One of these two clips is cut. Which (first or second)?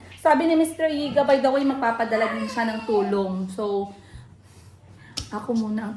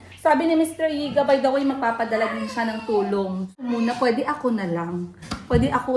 second